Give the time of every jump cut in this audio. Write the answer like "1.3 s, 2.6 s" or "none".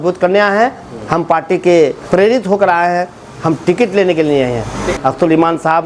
2.0 s, 4.9 s